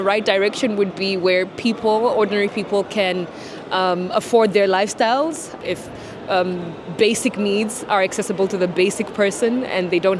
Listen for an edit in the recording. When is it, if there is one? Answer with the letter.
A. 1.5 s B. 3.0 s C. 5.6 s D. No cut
C